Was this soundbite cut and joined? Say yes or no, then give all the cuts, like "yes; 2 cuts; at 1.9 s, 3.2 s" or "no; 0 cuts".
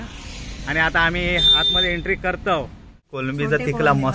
yes; 1 cut; at 3.2 s